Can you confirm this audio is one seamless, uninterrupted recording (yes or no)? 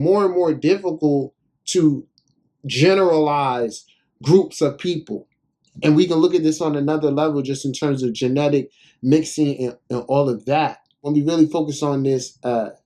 no